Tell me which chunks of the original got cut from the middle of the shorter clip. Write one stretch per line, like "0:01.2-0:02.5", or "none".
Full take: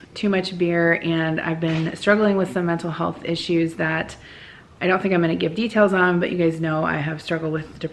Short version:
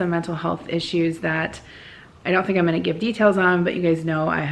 none